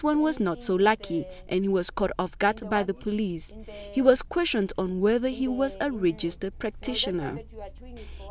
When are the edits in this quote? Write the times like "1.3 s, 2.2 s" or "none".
3.4 s